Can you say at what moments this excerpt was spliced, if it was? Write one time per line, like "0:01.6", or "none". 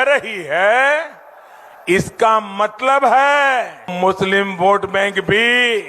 0:03.9